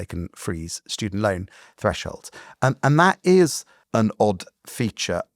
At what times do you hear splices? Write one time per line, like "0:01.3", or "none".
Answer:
0:03.8